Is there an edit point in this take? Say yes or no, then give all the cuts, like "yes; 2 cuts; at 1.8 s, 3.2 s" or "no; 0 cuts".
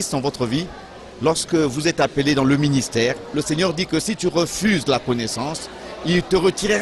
yes; 1 cut; at 3.3 s